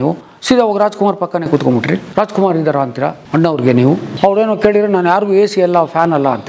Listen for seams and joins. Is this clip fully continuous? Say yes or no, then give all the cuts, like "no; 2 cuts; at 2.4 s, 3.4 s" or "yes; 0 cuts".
yes; 0 cuts